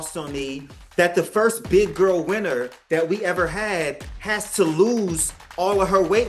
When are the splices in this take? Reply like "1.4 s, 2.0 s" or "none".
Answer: none